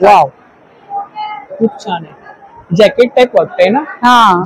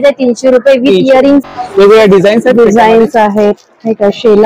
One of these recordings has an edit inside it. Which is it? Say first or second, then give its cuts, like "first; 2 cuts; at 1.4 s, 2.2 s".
second; 1 cut; at 1.4 s